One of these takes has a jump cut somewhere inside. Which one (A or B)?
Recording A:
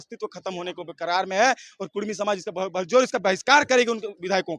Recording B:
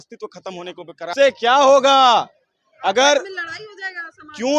B